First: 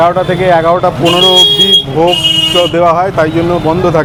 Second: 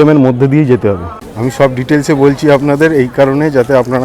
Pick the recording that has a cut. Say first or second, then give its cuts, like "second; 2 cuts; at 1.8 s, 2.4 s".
second; 1 cut; at 1.1 s